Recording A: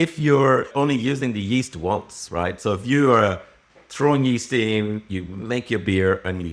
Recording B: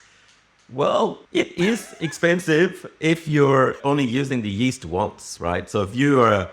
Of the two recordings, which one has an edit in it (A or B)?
B